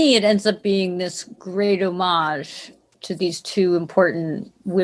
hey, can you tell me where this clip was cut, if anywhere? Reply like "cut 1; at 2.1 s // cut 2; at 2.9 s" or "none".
none

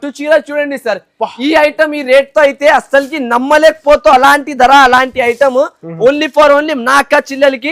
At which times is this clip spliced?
none

